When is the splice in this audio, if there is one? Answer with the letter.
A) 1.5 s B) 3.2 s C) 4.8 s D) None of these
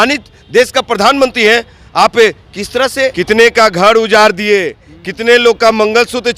B